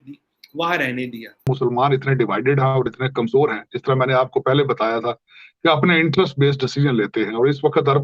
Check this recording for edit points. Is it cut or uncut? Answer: cut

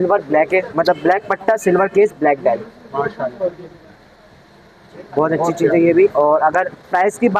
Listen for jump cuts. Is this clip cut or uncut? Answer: uncut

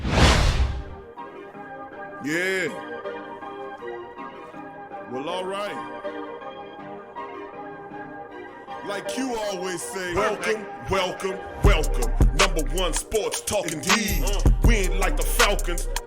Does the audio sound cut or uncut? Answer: cut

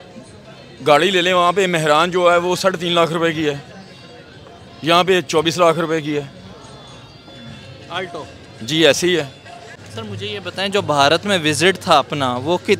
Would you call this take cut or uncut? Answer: cut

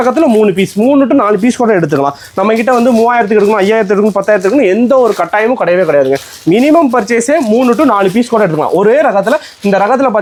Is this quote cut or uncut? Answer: uncut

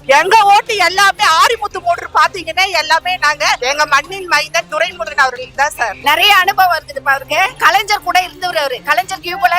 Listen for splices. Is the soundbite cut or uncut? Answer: cut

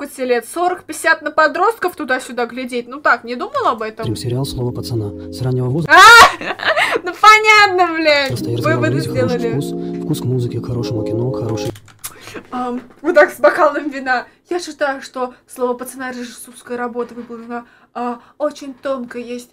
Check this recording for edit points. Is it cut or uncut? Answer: uncut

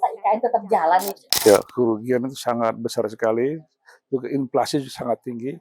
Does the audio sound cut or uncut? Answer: cut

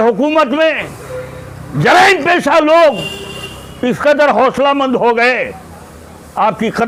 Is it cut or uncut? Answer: uncut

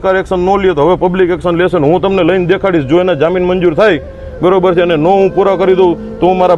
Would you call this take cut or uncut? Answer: uncut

